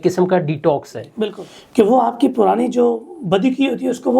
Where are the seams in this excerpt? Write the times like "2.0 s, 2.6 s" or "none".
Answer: 1.5 s